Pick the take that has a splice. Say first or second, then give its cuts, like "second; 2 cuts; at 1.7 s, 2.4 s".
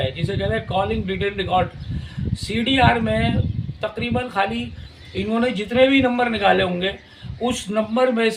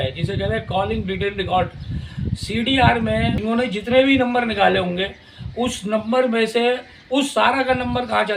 second; 1 cut; at 3.4 s